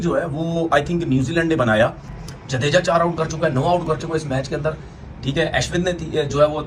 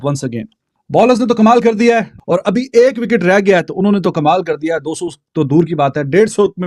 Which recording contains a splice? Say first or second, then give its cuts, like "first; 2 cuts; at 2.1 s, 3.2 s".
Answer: first; 1 cut; at 2.1 s